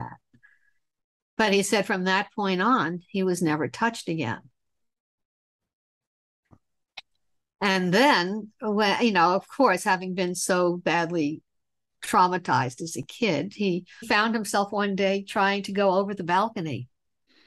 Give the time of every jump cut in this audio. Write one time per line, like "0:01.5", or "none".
0:14.0